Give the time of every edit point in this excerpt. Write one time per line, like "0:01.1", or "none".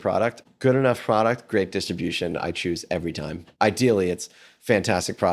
0:03.5